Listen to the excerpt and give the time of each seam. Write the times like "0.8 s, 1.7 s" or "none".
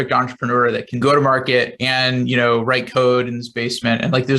0.9 s